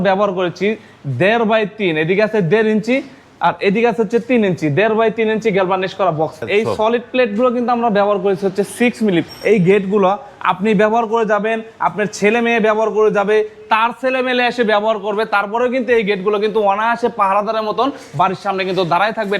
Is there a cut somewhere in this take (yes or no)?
yes